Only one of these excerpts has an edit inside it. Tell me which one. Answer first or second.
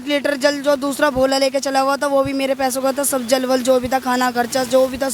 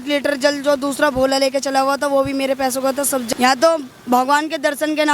second